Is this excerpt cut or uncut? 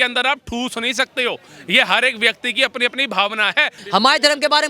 cut